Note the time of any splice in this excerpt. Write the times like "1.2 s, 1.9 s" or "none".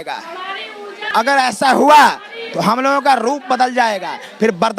1.0 s

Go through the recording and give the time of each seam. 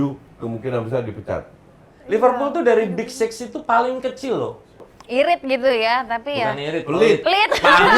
1.9 s, 4.9 s

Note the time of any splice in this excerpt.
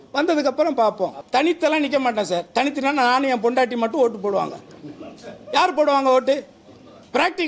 1.2 s

